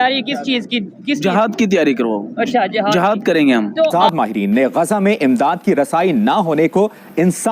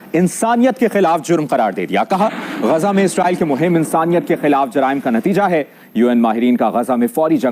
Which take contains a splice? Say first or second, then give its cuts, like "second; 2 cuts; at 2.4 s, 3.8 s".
first; 1 cut; at 3.9 s